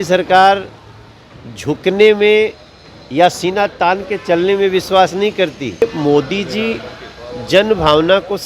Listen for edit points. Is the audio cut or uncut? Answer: cut